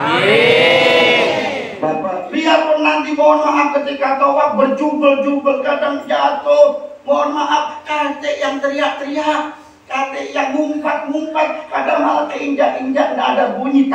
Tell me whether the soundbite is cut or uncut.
cut